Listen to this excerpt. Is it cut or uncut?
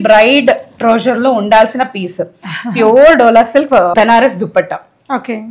cut